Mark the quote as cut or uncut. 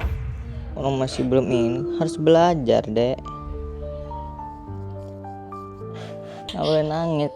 cut